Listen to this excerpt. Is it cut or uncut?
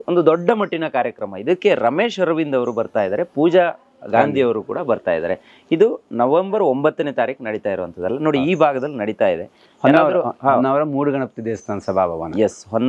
uncut